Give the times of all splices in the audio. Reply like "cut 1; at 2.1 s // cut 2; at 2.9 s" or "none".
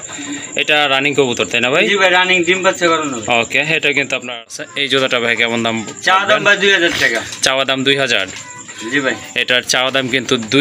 cut 1; at 4.4 s